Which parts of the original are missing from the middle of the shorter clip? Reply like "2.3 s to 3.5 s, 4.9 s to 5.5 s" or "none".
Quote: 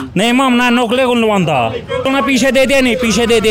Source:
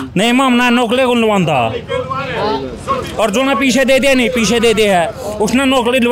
2.0 s to 3.4 s